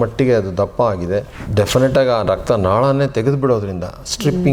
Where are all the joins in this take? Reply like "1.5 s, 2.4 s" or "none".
1.4 s

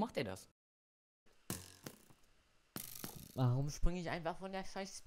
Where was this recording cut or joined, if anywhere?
1.2 s

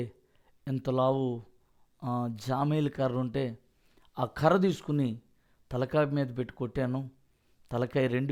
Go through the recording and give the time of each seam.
none

